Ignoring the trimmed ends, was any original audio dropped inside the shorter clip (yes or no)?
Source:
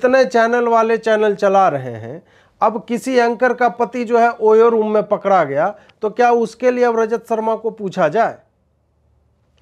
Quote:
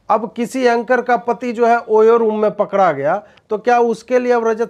no